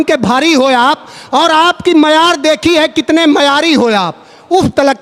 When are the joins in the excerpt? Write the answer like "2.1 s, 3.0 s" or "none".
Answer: none